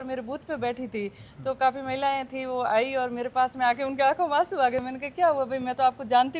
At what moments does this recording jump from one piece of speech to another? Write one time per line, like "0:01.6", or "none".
none